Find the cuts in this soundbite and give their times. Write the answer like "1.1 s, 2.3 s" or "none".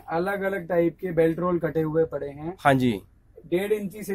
none

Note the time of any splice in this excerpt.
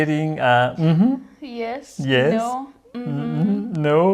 none

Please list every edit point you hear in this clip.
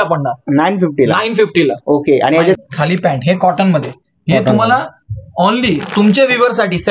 2.6 s

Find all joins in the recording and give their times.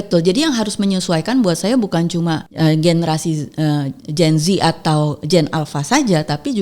2.5 s

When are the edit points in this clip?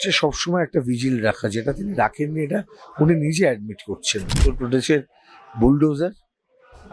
4.5 s

